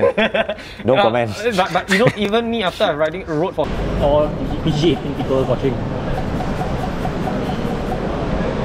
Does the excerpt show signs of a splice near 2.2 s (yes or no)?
no